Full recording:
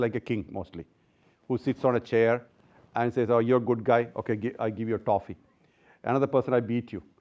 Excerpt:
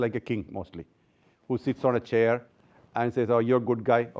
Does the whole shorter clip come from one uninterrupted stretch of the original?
yes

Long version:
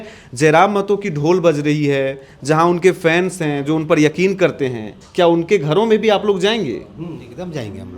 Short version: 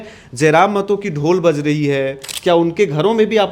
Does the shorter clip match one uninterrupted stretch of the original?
no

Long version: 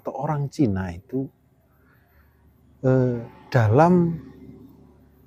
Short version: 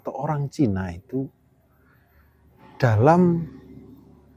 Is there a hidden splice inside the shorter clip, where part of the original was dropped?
yes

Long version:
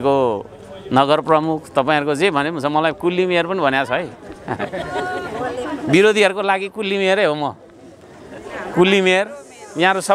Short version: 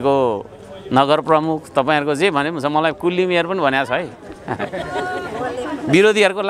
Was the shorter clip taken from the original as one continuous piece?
yes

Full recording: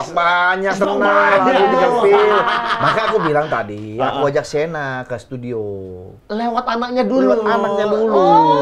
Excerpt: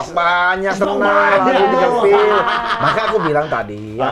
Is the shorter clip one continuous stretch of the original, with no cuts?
yes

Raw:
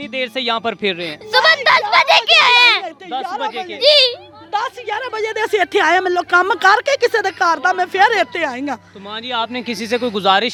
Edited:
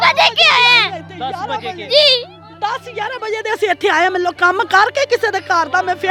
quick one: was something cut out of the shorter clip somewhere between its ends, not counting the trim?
no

